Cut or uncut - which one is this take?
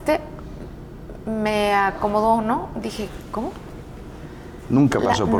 uncut